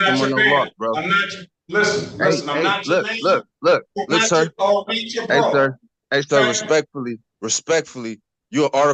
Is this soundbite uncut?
yes; 0 cuts

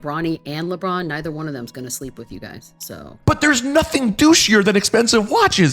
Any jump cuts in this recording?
yes; 1 cut; at 3.1 s

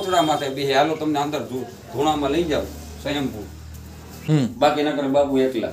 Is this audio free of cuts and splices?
no; 1 cut; at 4.2 s

